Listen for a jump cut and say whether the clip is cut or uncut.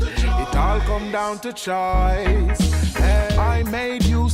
cut